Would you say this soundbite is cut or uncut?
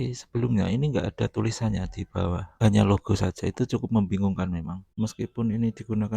cut